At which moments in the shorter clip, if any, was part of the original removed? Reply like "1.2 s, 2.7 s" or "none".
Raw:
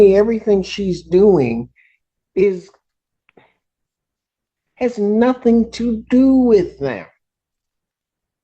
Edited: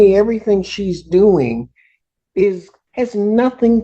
2.8 s

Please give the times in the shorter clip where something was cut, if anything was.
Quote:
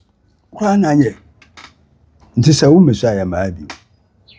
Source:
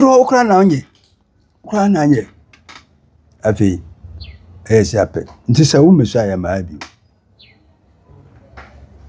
2.1 s

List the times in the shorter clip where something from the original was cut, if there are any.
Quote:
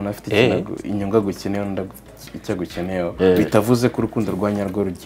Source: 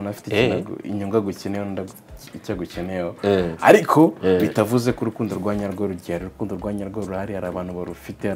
3.1 s

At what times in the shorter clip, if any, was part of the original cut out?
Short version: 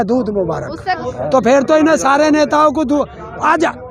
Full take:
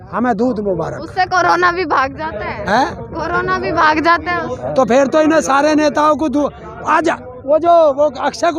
1.0 s

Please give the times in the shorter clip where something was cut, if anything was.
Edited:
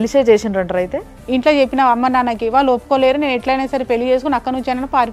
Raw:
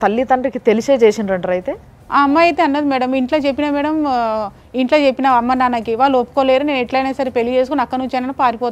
1.1 s

